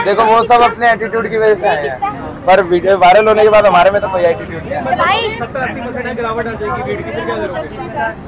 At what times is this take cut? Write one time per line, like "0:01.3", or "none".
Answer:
none